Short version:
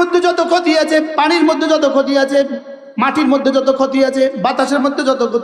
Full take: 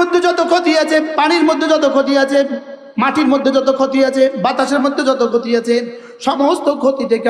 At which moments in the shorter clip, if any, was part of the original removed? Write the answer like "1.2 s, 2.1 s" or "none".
none